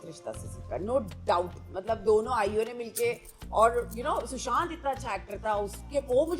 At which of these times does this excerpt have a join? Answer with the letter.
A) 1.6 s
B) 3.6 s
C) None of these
C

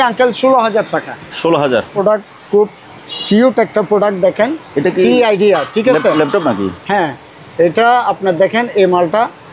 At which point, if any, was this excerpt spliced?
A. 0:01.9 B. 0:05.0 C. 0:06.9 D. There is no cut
A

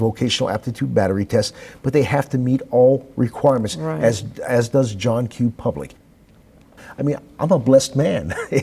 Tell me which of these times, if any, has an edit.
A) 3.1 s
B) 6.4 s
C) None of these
B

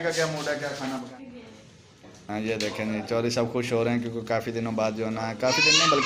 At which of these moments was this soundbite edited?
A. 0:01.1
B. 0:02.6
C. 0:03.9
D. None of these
A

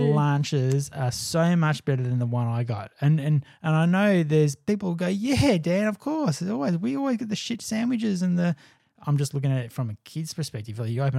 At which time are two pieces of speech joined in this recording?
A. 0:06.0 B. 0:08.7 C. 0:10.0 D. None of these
B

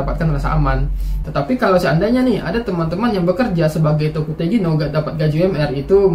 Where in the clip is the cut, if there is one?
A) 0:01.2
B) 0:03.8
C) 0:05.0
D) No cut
A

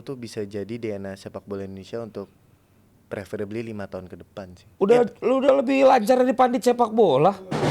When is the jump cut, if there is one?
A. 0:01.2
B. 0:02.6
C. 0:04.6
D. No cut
C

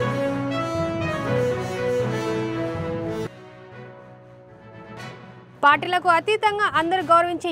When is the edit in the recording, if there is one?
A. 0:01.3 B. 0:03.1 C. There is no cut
B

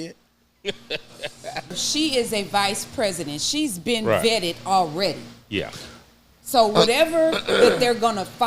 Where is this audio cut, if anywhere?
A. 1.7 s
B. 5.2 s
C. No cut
A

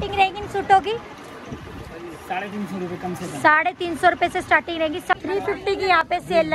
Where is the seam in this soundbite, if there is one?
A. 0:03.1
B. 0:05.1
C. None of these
B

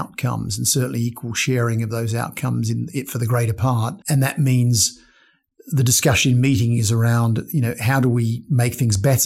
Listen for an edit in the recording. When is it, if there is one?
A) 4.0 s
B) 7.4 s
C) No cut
A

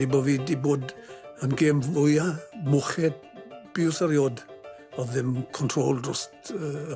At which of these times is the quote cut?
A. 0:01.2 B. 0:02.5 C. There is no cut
C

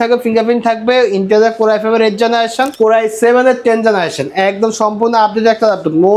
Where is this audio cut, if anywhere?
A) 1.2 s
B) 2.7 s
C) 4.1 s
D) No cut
B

